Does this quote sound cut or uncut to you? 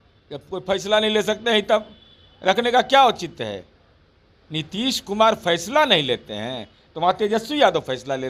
uncut